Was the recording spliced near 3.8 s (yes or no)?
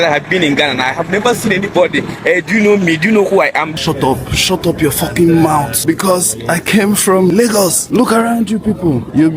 yes